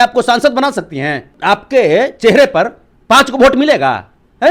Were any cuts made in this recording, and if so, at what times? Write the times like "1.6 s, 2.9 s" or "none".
1.3 s